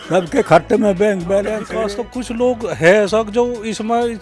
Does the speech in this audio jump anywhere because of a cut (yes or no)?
yes